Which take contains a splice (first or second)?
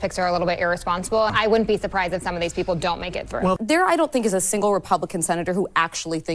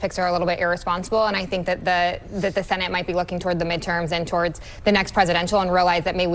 first